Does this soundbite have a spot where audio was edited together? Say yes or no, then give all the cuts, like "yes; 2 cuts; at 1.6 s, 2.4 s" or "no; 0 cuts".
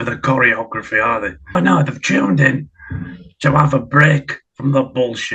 yes; 1 cut; at 1.5 s